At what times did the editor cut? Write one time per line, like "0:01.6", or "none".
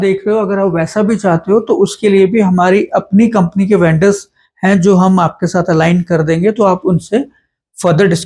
none